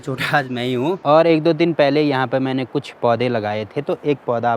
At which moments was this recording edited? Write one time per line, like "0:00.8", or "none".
0:01.0

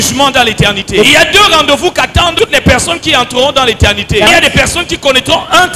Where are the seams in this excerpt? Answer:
0:01.1
0:04.3

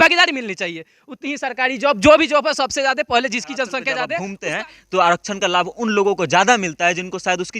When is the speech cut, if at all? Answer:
0:04.0

